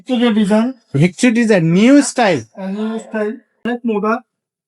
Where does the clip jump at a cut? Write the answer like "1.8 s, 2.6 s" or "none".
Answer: 3.6 s